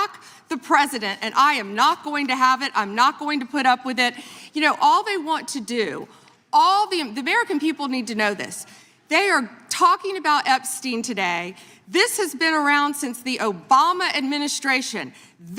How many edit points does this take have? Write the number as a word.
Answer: one